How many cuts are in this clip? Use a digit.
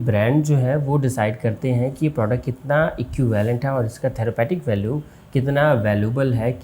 0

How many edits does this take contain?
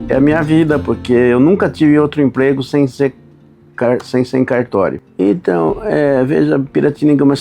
1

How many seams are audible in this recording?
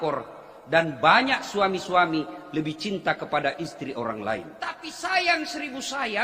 1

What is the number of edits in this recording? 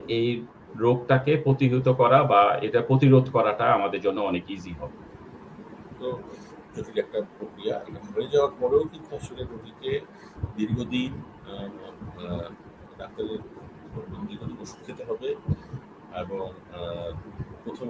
1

